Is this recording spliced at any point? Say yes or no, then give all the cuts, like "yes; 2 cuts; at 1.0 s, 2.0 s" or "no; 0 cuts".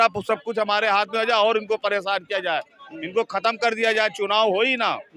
no; 0 cuts